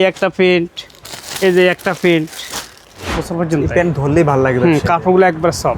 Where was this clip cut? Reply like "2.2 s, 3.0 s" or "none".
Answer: 3.2 s